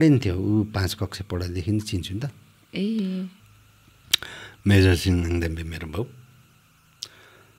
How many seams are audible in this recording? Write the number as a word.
one